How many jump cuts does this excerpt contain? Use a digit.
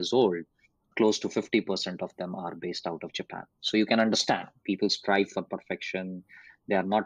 0